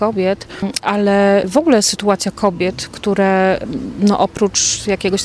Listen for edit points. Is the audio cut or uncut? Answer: cut